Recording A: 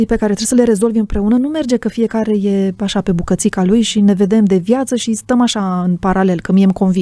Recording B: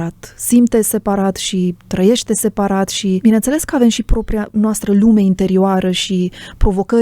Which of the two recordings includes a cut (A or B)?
B